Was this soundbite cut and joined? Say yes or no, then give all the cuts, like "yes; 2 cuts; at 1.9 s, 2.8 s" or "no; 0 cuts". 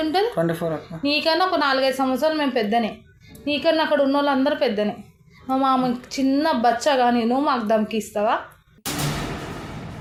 no; 0 cuts